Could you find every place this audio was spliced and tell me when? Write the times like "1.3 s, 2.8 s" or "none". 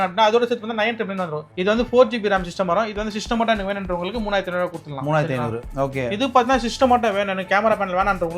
1.5 s, 5.6 s